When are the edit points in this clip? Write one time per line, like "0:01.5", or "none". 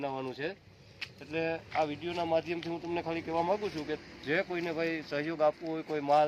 none